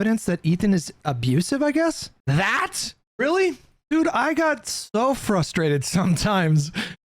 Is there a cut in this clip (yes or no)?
yes